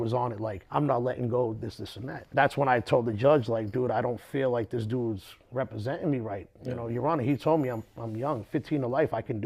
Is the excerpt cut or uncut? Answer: uncut